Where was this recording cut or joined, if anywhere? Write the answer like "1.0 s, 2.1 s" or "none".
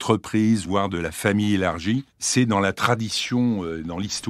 none